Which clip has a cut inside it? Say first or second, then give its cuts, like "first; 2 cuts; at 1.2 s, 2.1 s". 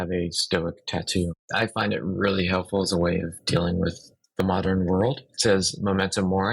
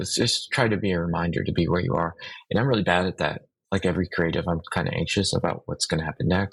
first; 2 cuts; at 1.4 s, 5.2 s